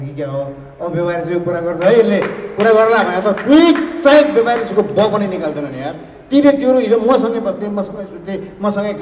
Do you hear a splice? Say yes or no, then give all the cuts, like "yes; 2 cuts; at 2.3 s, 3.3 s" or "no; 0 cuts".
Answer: no; 0 cuts